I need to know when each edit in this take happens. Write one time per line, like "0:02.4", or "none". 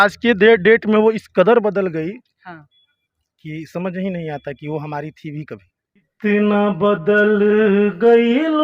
0:06.1

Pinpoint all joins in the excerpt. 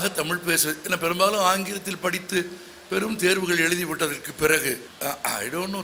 0:04.9

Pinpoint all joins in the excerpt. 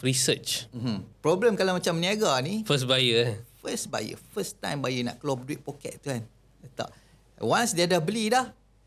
0:01.1

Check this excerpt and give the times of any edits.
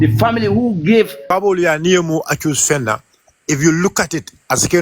0:01.3

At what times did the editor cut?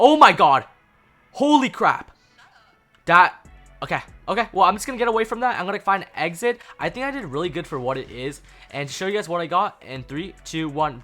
0:06.7

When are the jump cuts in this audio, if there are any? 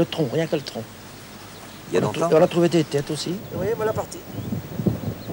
0:03.4

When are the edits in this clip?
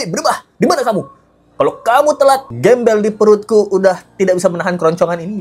none

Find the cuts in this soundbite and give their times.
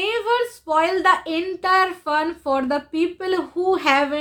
none

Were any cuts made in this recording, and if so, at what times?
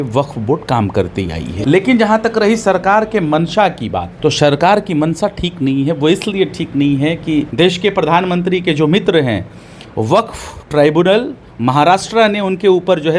0:01.5
0:04.1
0:07.5

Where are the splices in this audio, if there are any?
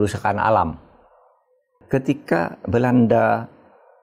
0:01.7

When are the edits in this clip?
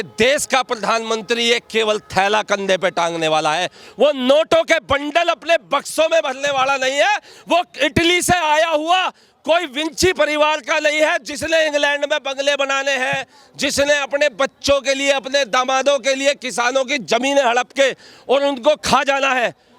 none

